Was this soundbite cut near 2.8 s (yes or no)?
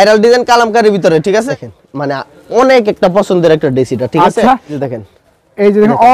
no